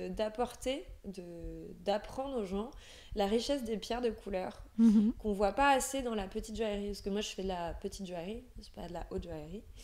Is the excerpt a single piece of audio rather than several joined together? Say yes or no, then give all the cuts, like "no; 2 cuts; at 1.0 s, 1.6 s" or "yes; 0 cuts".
yes; 0 cuts